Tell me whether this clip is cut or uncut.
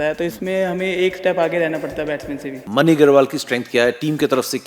cut